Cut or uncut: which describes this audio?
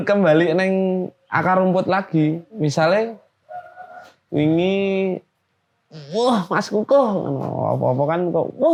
uncut